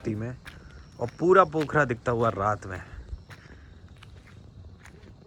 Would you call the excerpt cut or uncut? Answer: uncut